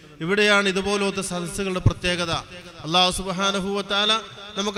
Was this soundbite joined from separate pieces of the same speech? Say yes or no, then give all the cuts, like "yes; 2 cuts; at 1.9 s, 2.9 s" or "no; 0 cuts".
no; 0 cuts